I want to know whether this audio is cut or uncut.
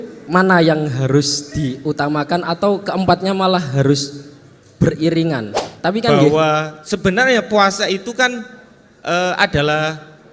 cut